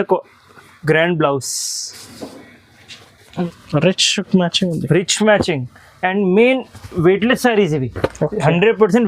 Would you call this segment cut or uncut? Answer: cut